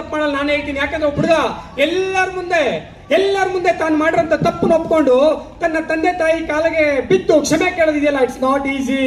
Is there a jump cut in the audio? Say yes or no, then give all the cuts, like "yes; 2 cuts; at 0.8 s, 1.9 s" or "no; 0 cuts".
no; 0 cuts